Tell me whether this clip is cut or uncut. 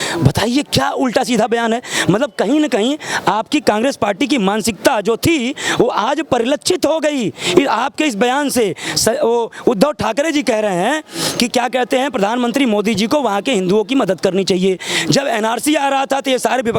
uncut